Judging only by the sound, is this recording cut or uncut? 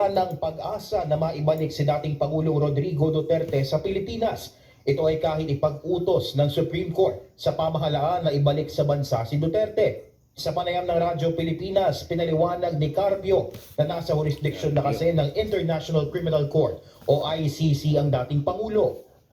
cut